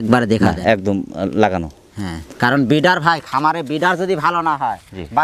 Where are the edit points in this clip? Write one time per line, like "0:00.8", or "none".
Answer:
none